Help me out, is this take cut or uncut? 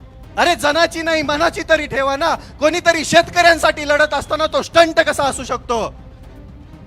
cut